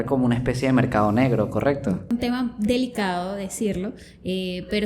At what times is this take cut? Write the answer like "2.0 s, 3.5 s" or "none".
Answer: 2.1 s